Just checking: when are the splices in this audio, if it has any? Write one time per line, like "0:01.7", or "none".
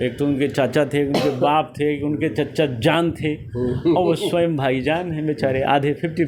none